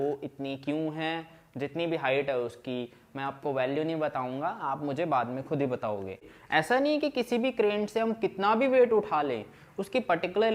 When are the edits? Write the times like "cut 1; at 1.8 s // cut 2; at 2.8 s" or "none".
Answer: cut 1; at 6.1 s